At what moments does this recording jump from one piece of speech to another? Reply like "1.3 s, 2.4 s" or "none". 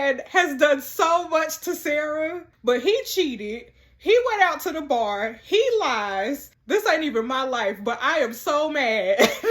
2.5 s, 6.5 s